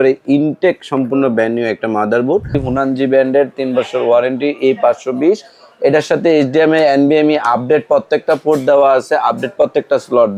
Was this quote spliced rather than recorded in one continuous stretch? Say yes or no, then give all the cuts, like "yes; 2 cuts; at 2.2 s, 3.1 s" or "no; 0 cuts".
yes; 1 cut; at 2.6 s